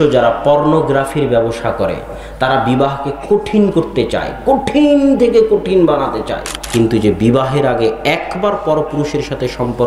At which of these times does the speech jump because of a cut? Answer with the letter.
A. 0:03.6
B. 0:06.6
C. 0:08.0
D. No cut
B